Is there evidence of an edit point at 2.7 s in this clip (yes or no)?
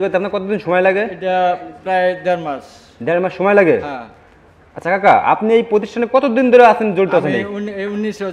no